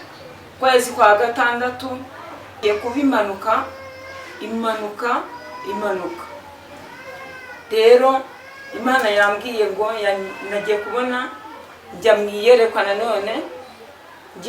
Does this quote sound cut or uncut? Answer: cut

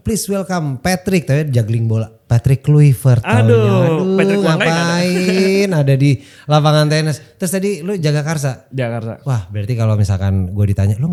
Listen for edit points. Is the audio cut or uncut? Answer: uncut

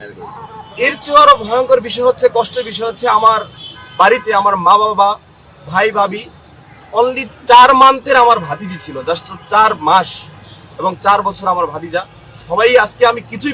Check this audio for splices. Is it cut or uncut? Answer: uncut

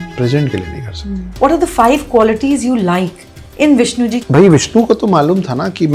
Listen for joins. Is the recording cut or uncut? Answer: cut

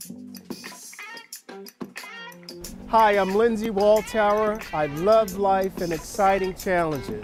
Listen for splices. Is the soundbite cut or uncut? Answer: uncut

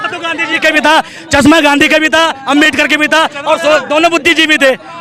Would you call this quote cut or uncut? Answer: uncut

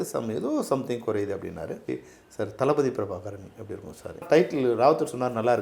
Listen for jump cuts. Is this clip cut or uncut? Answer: cut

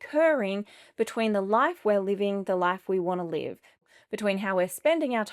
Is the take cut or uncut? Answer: cut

